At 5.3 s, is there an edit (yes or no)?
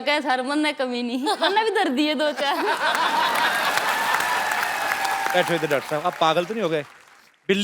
yes